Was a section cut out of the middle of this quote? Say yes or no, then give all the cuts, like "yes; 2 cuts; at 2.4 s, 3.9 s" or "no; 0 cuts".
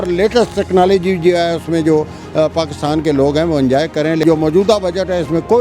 yes; 1 cut; at 4.2 s